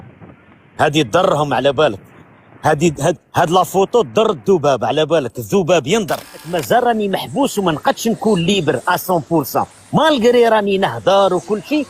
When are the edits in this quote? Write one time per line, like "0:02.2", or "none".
0:06.5

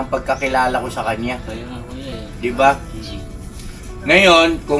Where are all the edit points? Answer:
none

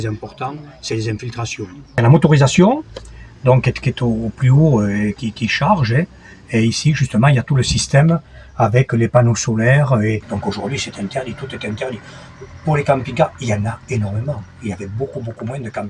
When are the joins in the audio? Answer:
0:01.9
0:10.3

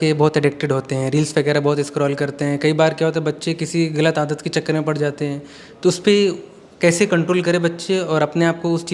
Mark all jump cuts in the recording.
none

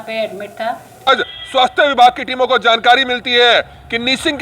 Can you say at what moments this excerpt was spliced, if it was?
0:01.1

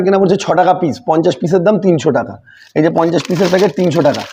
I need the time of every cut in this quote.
none

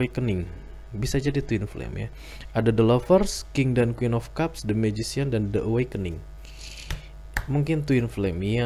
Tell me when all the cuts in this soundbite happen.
none

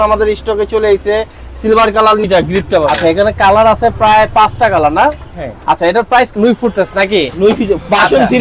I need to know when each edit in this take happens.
0:02.2
0:06.3

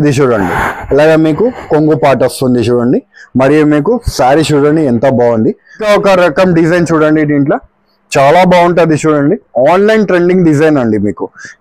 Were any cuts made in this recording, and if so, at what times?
0:05.8

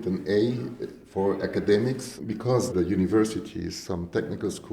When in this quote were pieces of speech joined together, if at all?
0:02.2

